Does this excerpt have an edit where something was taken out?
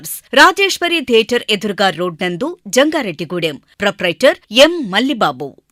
no; 0 cuts

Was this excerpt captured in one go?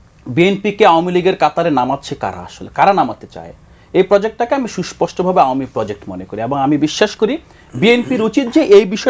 yes; 0 cuts

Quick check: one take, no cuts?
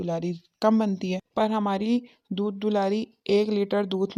yes; 0 cuts

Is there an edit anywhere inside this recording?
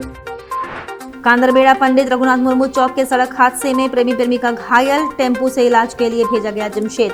no; 0 cuts

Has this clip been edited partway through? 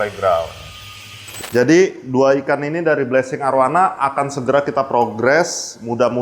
yes; 1 cut; at 1.3 s

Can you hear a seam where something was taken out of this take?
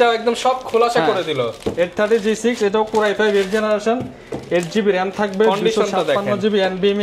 no; 0 cuts

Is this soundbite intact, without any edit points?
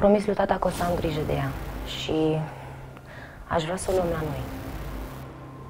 yes; 0 cuts

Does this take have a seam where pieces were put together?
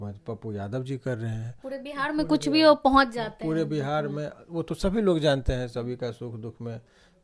no; 0 cuts

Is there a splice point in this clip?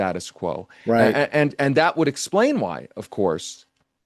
no; 0 cuts

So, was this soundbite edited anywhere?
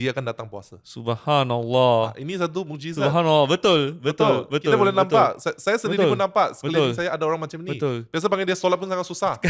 no; 0 cuts

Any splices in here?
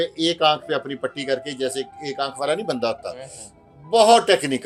no; 0 cuts

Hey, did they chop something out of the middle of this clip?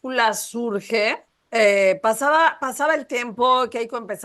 yes; 1 cut; at 1.3 s

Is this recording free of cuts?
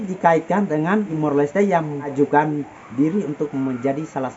no; 2 cuts; at 1.1 s, 2.1 s

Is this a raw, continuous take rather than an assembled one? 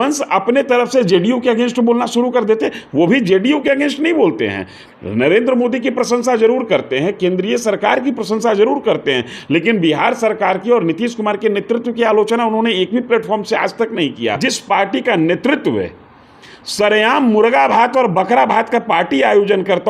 no; 1 cut; at 14.4 s

